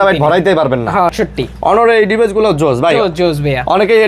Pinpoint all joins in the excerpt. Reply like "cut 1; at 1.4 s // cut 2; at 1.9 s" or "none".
cut 1; at 1.1 s